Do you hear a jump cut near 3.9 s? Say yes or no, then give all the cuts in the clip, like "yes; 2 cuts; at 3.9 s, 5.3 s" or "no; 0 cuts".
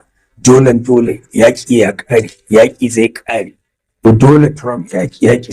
yes; 1 cut; at 3.9 s